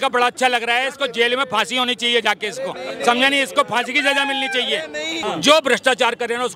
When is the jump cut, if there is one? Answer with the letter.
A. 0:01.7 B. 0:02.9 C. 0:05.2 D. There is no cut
C